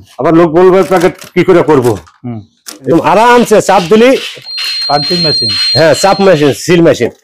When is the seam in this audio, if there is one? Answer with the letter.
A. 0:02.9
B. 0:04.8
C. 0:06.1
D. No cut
A